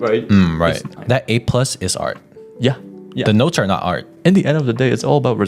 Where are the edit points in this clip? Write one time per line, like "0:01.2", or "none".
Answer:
0:00.9
0:04.1